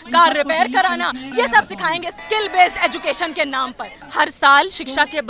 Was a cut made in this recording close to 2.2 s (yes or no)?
yes